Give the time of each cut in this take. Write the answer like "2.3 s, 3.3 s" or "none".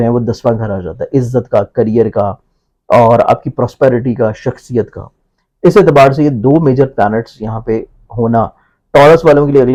none